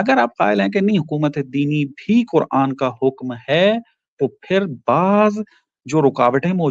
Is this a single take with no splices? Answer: yes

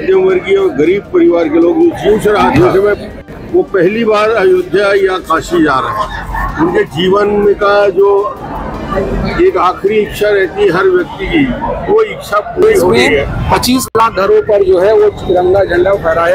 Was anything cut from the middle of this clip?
yes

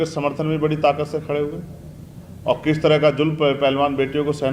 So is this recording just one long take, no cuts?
yes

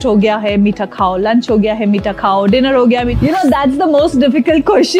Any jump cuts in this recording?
yes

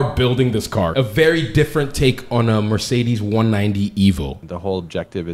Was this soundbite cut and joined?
yes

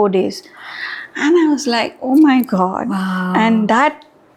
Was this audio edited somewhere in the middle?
no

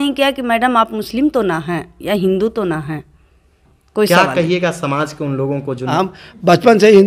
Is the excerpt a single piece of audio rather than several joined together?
no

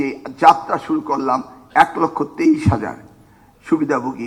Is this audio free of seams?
yes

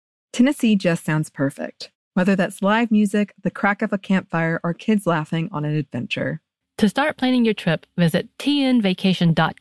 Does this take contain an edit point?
no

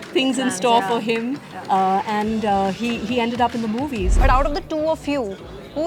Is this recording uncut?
no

